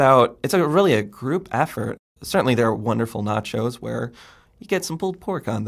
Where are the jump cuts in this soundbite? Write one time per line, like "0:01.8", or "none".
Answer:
0:02.0